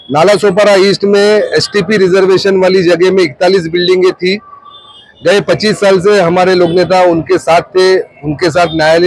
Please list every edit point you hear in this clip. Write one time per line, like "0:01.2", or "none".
none